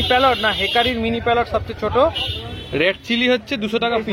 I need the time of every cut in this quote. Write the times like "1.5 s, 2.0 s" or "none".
2.5 s